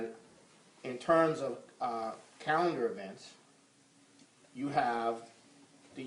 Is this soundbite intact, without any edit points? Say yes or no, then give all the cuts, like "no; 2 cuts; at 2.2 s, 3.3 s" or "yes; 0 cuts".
no; 1 cut; at 4.5 s